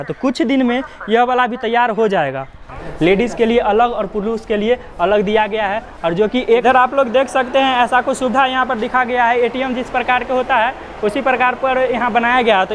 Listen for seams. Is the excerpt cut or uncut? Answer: cut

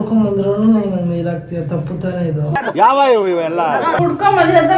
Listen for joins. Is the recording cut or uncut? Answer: uncut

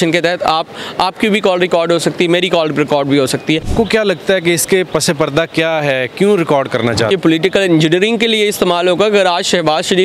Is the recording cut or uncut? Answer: cut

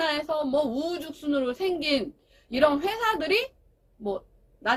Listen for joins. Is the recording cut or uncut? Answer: uncut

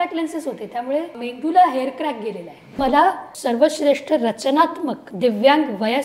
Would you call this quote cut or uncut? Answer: cut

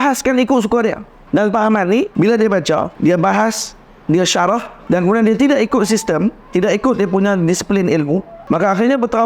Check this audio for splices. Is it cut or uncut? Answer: cut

